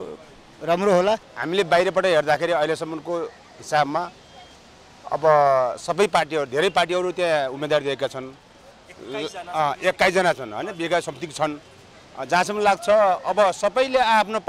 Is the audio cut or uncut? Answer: cut